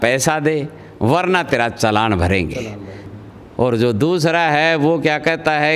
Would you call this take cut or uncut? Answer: cut